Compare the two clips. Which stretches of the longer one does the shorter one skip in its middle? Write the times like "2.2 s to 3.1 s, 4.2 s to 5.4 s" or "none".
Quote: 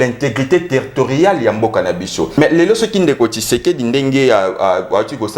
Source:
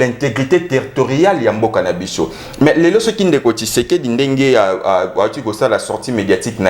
2.3 s to 2.6 s

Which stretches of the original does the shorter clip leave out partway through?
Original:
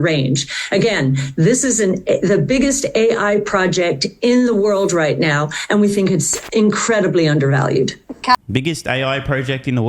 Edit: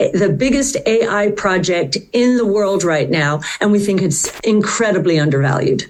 none

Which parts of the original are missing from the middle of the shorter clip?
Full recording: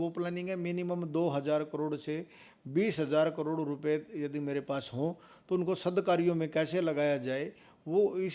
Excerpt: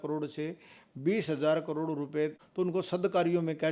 4.1 s to 5.3 s

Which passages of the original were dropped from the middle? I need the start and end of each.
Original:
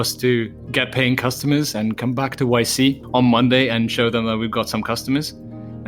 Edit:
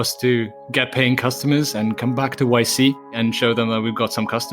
3.1 s to 3.7 s

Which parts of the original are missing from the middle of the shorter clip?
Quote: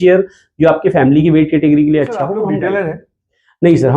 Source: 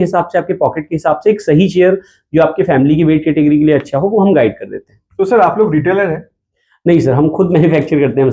4.1 s to 5.6 s

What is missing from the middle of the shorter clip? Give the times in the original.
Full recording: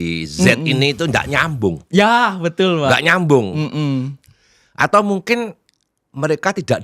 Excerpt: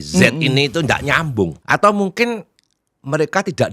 1.8 s to 4.7 s

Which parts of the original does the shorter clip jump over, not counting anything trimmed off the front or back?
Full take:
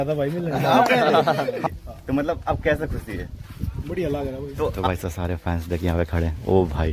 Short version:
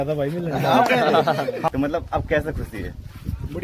1.7 s to 2.0 s

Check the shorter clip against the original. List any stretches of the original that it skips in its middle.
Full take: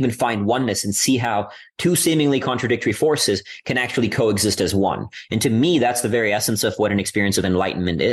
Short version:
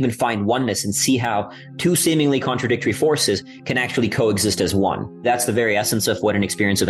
5.2 s to 5.8 s

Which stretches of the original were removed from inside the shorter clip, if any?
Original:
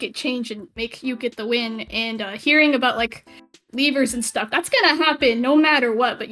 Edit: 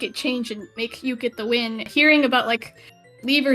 1.8 s to 2.3 s

